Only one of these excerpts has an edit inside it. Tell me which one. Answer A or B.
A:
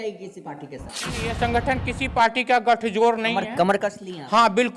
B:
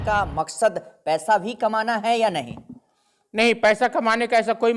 A